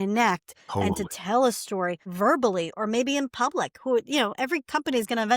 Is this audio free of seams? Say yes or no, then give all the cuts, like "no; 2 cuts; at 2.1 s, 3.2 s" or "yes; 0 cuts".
yes; 0 cuts